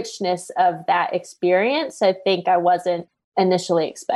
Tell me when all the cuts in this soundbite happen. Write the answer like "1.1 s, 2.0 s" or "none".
3.1 s